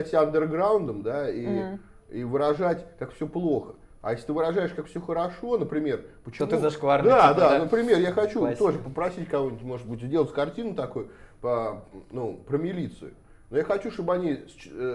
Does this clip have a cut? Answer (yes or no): no